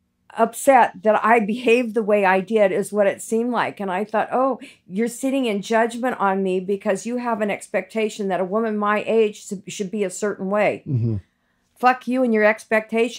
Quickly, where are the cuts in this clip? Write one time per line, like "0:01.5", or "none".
none